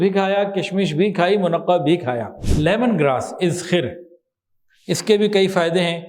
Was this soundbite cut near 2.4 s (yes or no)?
yes